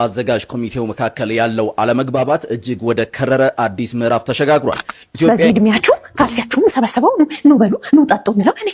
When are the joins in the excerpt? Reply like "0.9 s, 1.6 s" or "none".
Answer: 5.3 s